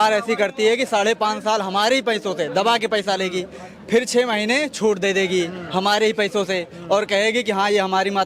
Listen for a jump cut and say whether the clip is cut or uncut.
uncut